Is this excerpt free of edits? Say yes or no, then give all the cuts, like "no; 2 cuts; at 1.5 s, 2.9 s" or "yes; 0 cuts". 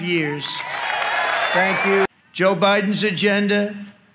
no; 1 cut; at 2.1 s